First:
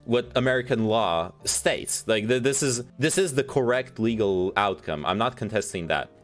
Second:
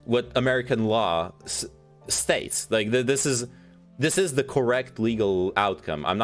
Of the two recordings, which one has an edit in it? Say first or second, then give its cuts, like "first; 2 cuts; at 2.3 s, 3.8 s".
first; 2 cuts; at 1.4 s, 2.9 s